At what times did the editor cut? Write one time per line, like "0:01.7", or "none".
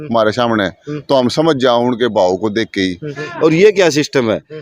0:03.2